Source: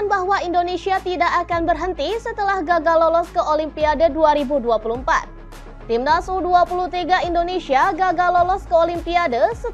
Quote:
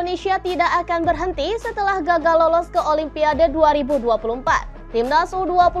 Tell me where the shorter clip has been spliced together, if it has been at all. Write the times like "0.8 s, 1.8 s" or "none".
4.7 s